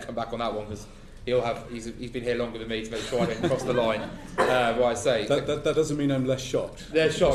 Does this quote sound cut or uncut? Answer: uncut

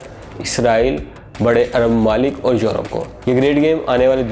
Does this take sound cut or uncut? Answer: cut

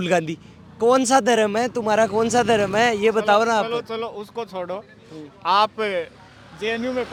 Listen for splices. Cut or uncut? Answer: uncut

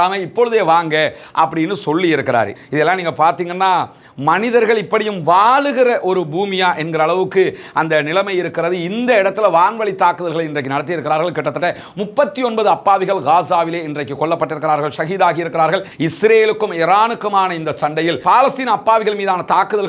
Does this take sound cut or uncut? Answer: cut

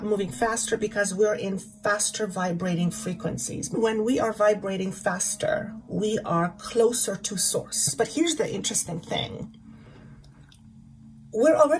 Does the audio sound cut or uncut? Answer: cut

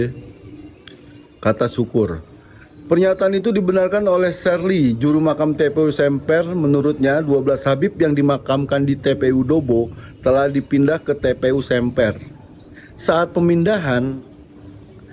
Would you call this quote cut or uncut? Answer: uncut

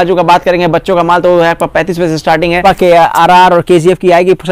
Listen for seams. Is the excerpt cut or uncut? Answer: cut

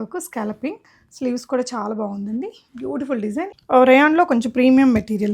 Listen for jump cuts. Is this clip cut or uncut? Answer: cut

